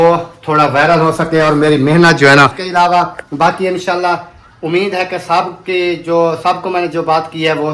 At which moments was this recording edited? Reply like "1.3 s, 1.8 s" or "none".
2.6 s